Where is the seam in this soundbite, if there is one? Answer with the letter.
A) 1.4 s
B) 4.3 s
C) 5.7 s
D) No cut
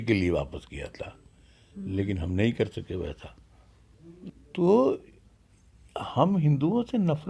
B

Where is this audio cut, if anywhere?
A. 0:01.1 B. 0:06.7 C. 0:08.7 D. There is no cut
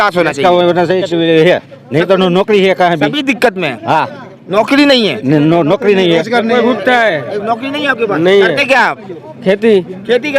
A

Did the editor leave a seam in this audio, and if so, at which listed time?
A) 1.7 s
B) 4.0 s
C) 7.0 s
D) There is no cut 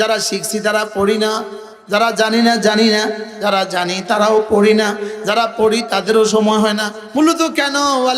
C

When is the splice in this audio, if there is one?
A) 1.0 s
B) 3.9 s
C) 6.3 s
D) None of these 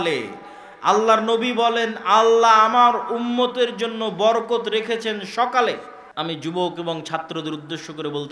C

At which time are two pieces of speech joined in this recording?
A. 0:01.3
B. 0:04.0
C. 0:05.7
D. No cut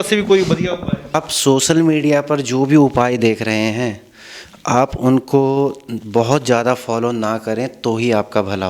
A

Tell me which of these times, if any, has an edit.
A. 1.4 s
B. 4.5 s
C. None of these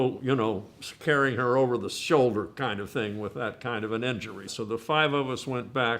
B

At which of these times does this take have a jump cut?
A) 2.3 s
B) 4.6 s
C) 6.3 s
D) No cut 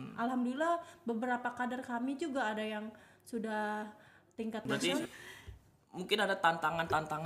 B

